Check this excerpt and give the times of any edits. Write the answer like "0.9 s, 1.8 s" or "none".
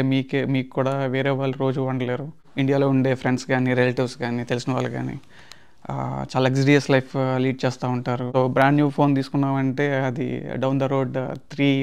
2.5 s, 8.2 s

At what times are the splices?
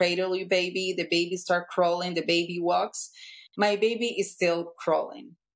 none

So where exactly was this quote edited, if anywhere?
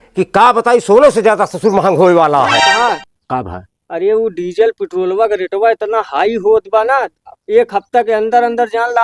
2.6 s

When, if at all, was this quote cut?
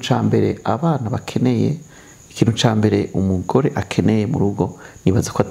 none

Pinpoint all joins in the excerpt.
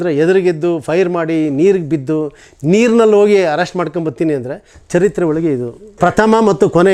none

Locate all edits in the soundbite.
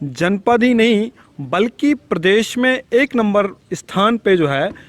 none

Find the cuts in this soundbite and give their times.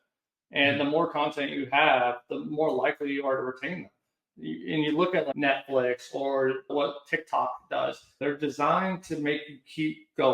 5.3 s, 8.2 s

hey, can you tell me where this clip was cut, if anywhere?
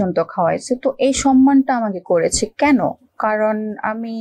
none

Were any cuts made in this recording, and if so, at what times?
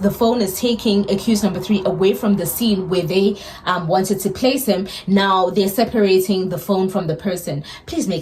none

